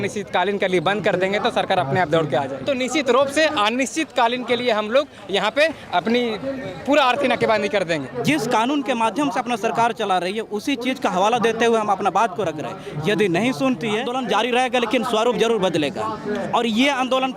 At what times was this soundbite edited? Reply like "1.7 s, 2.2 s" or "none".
2.6 s, 8.1 s, 14.1 s

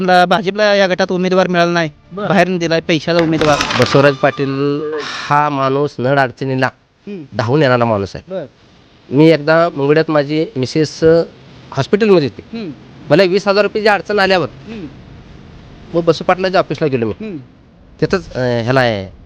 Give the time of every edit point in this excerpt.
3.7 s

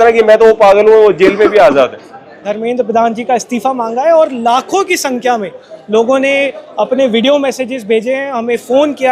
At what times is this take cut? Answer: 2.5 s

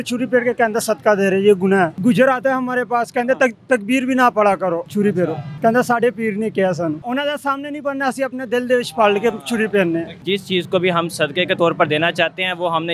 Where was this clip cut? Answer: 1.9 s, 5.0 s, 7.0 s, 10.2 s

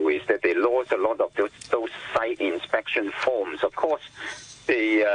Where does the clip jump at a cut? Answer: none

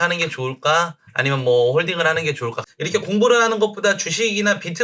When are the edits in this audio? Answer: 2.6 s

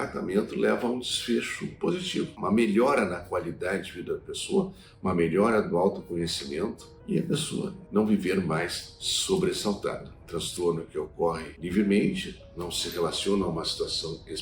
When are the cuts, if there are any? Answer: 10.1 s, 11.5 s

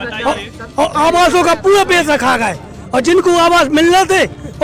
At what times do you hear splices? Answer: none

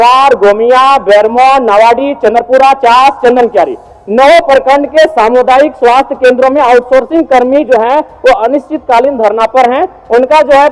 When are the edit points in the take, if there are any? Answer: none

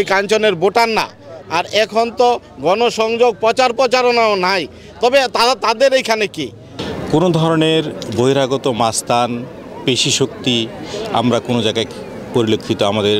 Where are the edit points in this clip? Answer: 1.3 s

